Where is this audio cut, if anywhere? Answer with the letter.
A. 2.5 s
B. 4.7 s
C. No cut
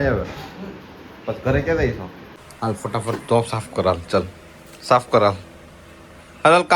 A